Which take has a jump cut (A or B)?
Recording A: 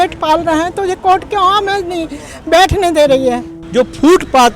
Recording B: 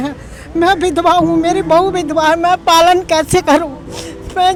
A